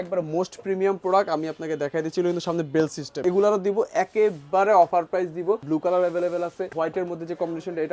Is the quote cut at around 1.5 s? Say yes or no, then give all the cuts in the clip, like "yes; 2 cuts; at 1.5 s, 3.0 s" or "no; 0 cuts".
no; 3 cuts; at 3.2 s, 5.6 s, 6.7 s